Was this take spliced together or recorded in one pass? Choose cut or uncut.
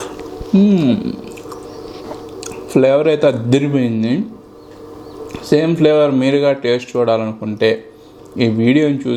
uncut